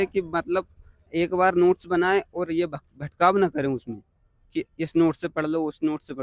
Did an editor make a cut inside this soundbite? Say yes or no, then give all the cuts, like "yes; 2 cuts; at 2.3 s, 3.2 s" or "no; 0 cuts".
no; 0 cuts